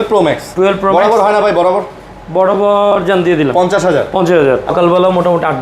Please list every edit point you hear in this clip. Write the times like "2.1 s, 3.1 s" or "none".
4.7 s